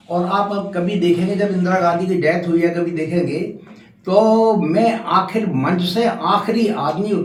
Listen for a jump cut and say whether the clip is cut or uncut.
uncut